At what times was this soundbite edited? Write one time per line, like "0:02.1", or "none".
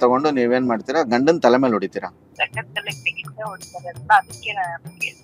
0:02.3